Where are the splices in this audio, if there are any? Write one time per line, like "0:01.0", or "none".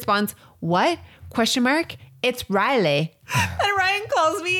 0:03.2